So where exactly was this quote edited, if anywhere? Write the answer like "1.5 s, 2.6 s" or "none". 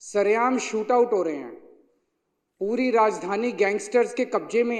none

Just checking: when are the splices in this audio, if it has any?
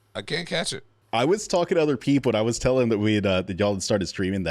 1.0 s

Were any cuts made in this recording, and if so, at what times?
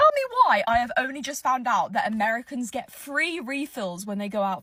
none

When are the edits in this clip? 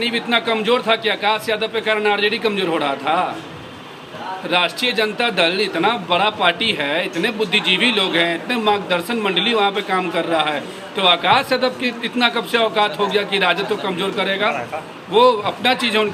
none

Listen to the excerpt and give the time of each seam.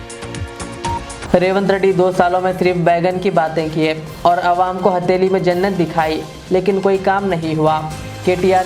1.1 s

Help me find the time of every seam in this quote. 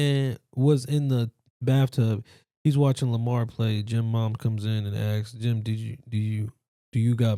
none

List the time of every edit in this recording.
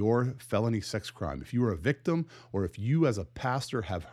none

